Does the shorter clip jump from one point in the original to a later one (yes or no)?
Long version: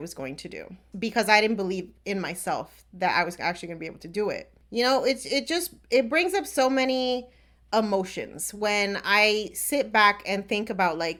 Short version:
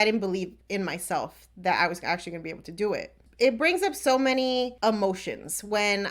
yes